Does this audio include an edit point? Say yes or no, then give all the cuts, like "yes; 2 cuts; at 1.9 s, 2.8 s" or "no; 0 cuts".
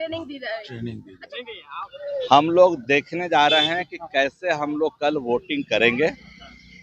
yes; 1 cut; at 1.1 s